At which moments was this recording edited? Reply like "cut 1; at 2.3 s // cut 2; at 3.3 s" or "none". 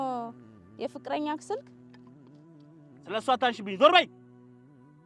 none

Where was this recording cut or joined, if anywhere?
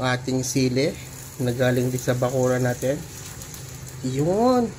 none

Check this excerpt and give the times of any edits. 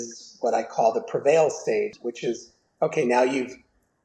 cut 1; at 1.9 s

